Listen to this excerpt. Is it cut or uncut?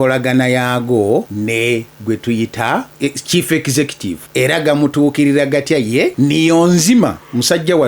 cut